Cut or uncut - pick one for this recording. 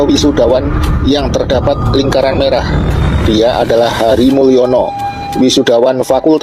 uncut